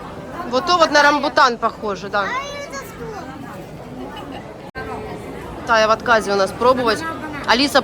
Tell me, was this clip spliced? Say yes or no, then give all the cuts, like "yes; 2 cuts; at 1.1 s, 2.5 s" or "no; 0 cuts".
no; 0 cuts